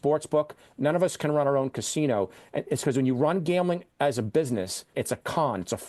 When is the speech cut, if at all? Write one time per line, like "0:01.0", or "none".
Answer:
0:04.9